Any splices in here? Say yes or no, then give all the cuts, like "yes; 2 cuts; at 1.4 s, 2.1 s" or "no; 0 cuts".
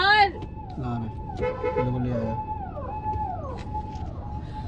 no; 0 cuts